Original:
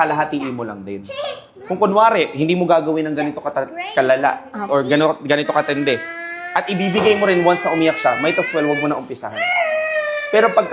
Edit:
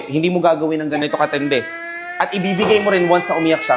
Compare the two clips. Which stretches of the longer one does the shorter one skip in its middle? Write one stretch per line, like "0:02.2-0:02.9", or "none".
0:03.3-0:05.4